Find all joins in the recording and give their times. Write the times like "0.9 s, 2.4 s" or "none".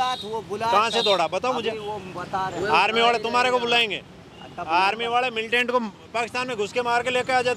none